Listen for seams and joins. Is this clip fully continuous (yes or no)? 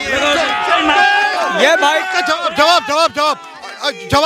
yes